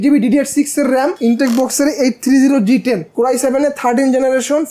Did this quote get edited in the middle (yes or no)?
yes